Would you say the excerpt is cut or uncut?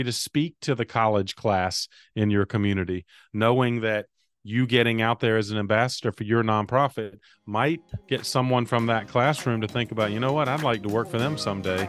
uncut